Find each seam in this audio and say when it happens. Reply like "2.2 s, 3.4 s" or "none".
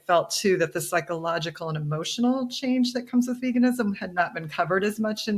none